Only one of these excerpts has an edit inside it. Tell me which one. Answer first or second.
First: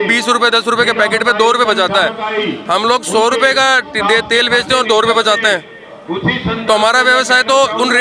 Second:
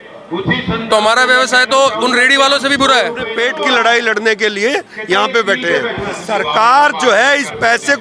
second